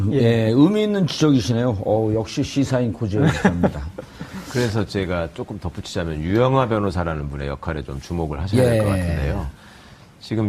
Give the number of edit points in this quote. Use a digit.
1